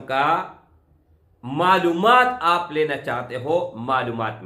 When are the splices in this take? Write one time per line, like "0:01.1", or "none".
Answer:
none